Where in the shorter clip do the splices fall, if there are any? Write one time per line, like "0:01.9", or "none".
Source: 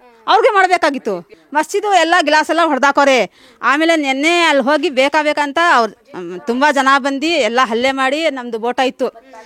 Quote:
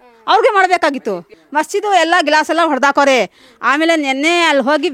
none